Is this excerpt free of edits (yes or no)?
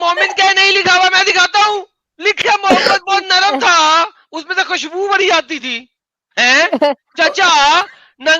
no